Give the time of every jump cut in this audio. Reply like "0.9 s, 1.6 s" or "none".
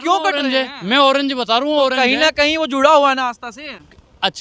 none